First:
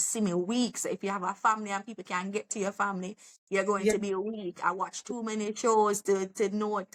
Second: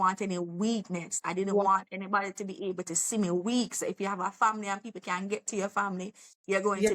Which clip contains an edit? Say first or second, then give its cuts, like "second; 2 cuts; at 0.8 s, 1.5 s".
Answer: second; 1 cut; at 1.1 s